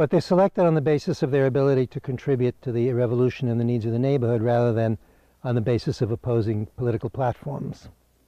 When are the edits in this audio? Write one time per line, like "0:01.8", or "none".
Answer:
0:01.3